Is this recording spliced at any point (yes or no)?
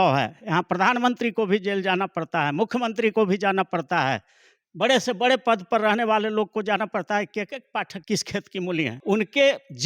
yes